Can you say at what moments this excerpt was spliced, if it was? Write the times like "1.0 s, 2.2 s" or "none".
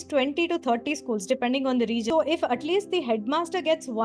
2.1 s